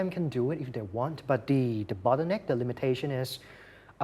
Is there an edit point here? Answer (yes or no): no